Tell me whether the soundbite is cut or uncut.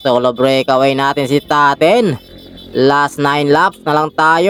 uncut